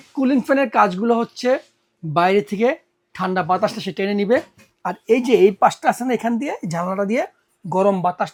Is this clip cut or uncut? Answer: uncut